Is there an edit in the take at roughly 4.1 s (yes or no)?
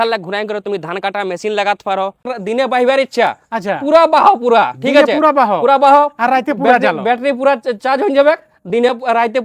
no